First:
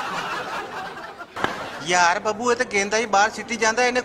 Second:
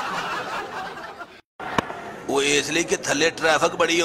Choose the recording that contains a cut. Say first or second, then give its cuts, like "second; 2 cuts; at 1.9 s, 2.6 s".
first; 1 cut; at 1.2 s